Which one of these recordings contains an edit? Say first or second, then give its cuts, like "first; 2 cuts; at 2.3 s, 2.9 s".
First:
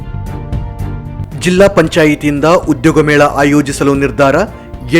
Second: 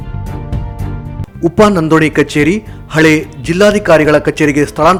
first; 1 cut; at 1.3 s